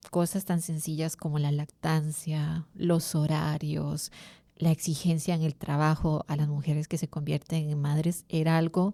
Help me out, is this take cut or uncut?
uncut